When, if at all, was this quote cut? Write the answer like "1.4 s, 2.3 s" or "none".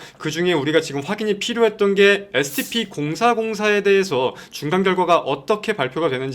none